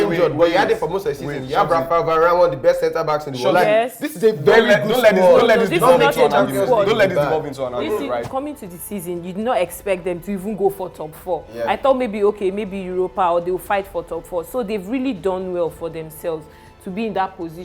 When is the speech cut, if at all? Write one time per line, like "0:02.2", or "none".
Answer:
0:08.2